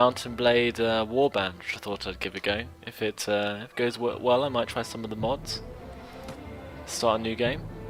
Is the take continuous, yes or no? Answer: yes